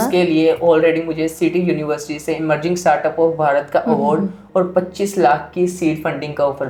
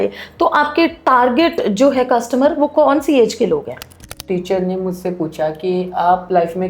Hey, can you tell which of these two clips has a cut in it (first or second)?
second